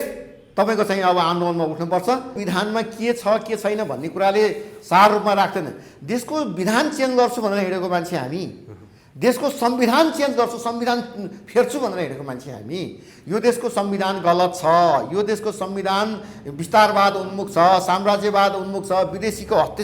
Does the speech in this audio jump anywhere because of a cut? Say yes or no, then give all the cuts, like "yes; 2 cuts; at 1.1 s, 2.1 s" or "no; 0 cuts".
yes; 1 cut; at 2.4 s